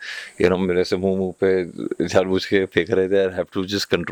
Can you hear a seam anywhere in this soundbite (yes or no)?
no